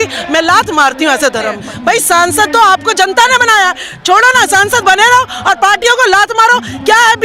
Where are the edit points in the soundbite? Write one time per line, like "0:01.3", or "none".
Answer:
0:01.7